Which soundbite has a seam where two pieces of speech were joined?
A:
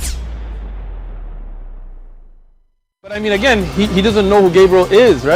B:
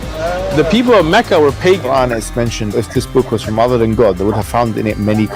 B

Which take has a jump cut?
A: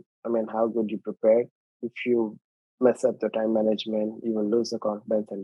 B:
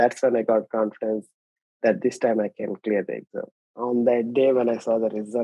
B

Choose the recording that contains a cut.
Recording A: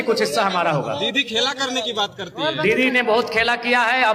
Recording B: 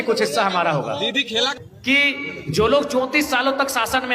B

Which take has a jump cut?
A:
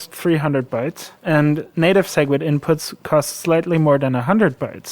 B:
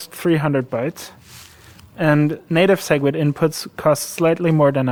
A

